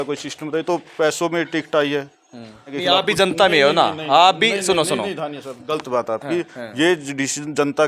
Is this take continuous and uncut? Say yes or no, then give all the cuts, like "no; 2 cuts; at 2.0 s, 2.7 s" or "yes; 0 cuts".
no; 1 cut; at 2.8 s